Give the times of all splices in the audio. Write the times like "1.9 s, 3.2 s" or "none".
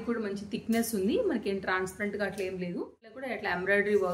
3.2 s